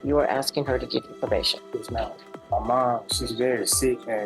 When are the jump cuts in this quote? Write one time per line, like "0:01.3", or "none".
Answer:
0:02.3